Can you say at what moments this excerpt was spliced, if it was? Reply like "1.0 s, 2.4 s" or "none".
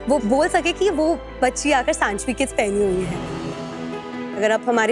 none

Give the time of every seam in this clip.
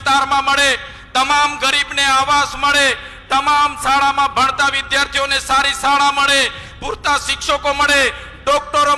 none

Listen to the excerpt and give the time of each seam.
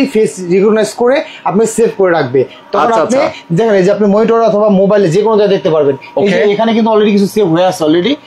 none

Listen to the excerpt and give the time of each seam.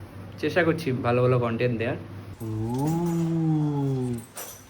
2.5 s

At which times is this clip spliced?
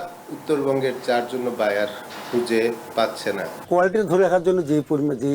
3.6 s

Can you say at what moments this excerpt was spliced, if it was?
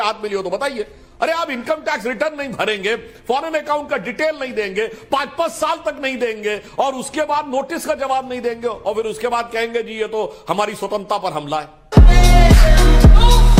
none

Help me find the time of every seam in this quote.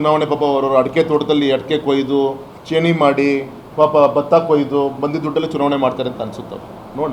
2.5 s, 3.6 s

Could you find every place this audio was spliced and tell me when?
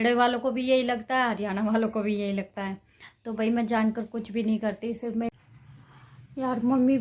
5.3 s

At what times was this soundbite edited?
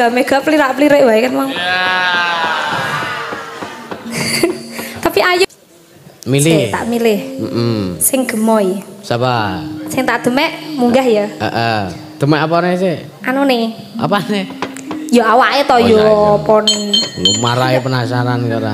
5.4 s

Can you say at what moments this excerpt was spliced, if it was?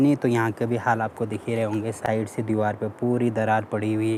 none

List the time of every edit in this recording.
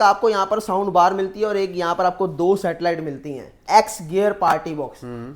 3.6 s

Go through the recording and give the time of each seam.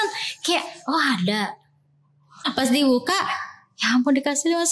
2.2 s

